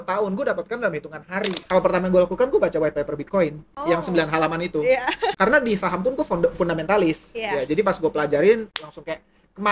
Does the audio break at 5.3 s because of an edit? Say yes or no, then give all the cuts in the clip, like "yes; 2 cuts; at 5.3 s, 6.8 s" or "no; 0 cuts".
yes; 4 cuts; at 1.6 s, 3.7 s, 5.3 s, 8.8 s